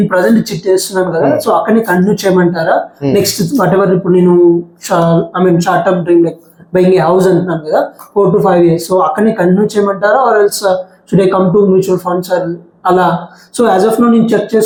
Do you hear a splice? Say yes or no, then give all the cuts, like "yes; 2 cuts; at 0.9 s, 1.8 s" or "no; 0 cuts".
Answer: no; 0 cuts